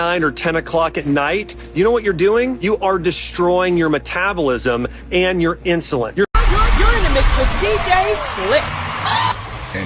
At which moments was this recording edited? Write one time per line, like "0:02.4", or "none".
0:06.3

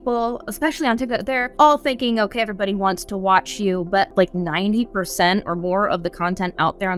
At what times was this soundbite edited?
0:01.5
0:04.1

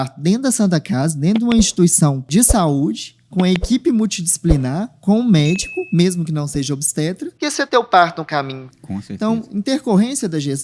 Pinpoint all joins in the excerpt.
0:02.3
0:07.3

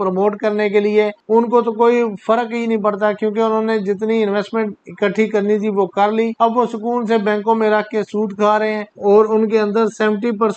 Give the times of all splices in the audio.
0:01.2
0:06.3
0:08.9

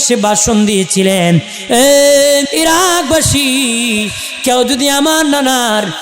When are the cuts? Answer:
0:01.5
0:02.5

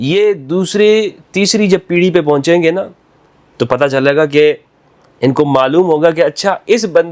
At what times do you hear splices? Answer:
none

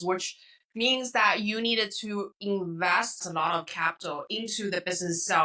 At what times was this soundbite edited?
0:03.2

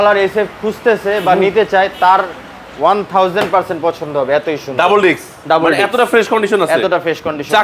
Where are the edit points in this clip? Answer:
none

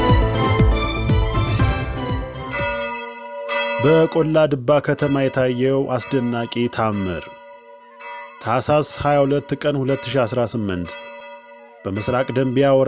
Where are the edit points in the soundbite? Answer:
0:02.5

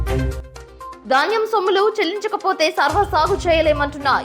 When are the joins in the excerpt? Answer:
0:01.0

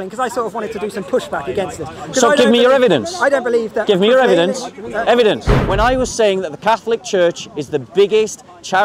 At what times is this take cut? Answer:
0:05.5

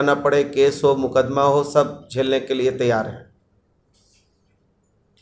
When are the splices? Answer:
none

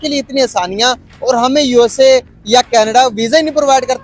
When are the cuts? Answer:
none

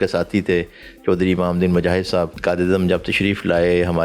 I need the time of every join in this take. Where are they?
0:02.3

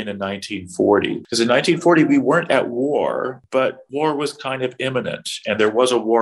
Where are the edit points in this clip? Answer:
0:01.2
0:03.6

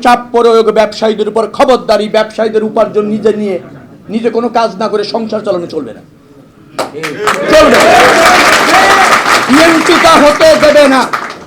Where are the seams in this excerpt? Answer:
none

